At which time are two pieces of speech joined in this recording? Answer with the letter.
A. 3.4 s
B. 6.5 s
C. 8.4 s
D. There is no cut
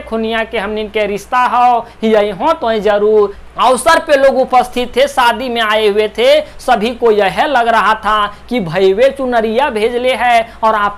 A